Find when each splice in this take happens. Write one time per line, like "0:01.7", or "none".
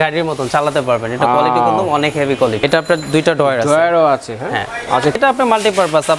0:02.6
0:05.2